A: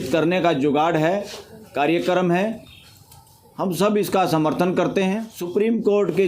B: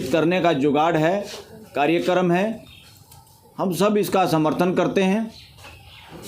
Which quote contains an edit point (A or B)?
A